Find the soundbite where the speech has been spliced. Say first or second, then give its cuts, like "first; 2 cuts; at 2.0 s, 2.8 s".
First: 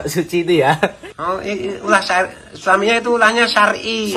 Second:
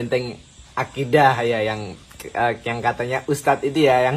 first; 1 cut; at 1.1 s